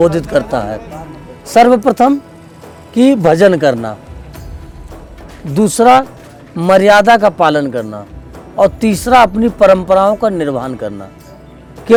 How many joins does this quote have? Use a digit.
0